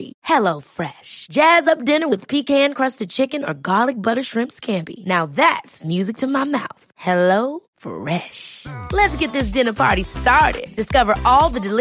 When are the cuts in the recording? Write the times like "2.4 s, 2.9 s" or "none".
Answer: none

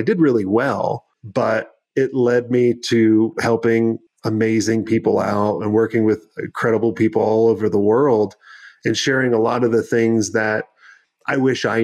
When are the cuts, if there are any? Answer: 1.1 s, 4.1 s

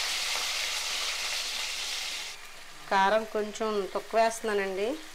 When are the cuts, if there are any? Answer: 2.3 s

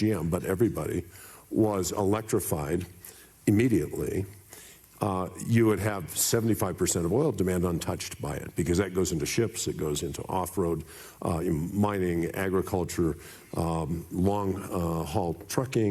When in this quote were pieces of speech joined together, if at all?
none

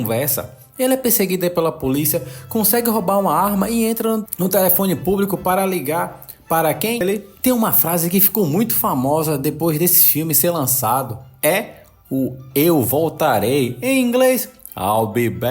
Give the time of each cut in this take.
7.0 s

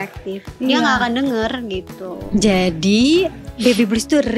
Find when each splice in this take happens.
2.3 s

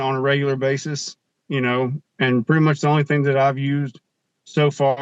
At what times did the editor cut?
none

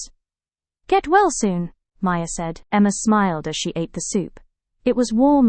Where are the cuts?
none

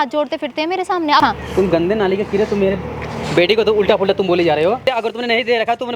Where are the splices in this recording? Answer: 1.2 s, 4.8 s

